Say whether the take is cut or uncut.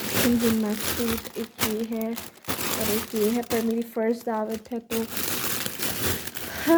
uncut